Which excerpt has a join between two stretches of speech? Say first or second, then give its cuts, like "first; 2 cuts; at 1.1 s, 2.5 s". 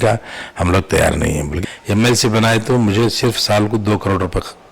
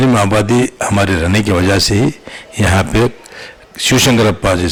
first; 1 cut; at 1.5 s